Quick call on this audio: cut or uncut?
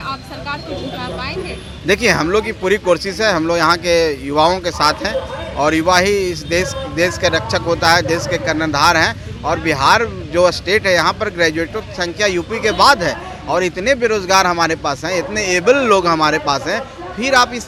uncut